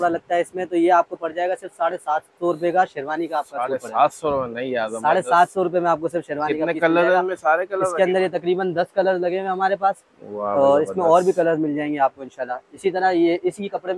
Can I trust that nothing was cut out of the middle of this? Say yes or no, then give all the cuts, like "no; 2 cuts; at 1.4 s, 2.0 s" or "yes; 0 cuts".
yes; 0 cuts